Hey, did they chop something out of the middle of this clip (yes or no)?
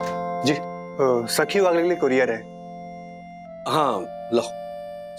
no